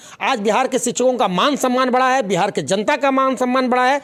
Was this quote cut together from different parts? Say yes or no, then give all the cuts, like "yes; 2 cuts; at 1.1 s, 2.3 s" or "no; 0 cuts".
no; 0 cuts